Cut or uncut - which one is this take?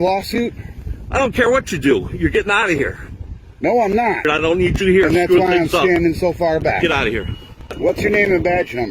cut